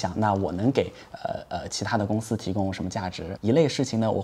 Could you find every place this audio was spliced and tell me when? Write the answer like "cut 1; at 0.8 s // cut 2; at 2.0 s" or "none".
cut 1; at 3.2 s